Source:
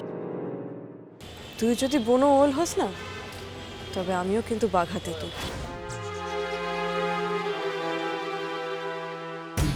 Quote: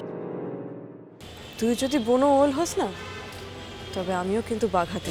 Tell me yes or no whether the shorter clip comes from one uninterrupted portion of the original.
yes